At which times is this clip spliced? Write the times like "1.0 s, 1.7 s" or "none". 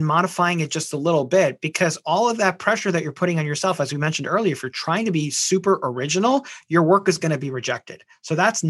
none